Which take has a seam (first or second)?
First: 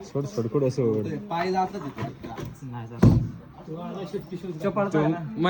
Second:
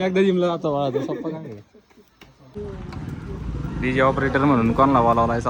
second